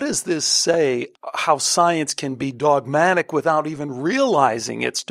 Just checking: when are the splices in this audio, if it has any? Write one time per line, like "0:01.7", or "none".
0:01.1